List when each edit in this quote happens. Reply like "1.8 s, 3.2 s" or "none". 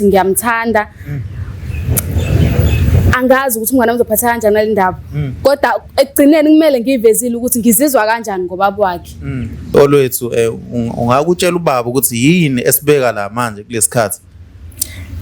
9.7 s